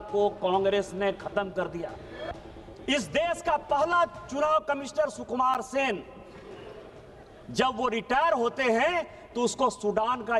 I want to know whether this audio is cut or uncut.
cut